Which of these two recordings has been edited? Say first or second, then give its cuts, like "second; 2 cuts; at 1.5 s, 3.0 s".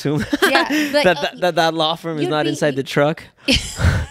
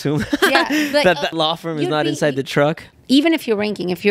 second; 2 cuts; at 1.3 s, 2.9 s